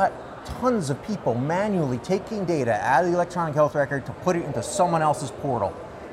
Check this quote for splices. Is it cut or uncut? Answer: uncut